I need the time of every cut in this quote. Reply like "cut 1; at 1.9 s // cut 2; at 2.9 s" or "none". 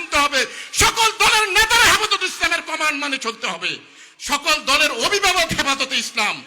cut 1; at 4.0 s